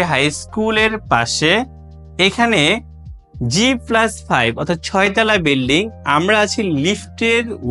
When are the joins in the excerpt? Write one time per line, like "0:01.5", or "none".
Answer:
none

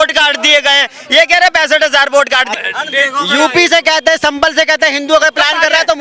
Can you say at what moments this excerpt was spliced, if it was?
0:02.5

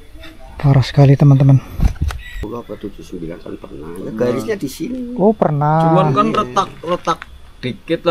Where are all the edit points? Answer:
0:02.4

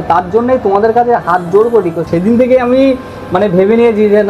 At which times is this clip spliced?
0:02.0

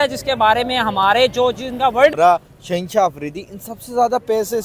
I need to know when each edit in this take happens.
0:02.1

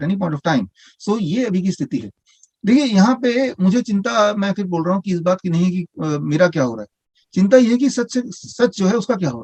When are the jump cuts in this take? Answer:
none

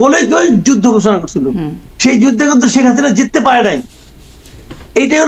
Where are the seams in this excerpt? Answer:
none

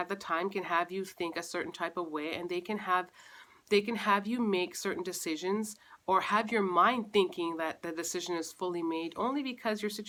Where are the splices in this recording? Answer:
none

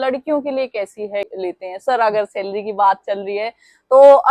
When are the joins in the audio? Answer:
0:01.3

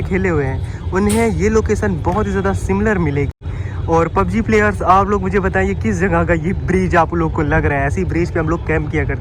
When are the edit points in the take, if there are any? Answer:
none

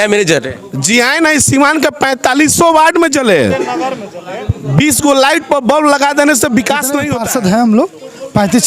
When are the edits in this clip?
0:07.0

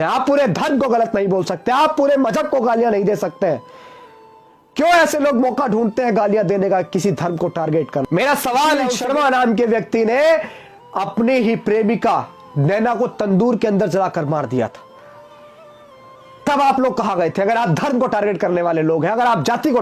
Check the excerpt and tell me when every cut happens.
0:08.9

